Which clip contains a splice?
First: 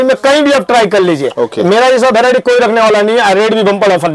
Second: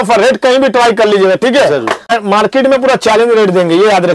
second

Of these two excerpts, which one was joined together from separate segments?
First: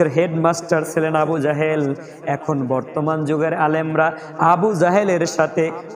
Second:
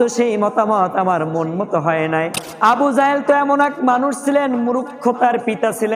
second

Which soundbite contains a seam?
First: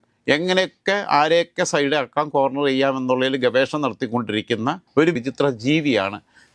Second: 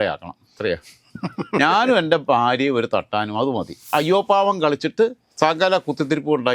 second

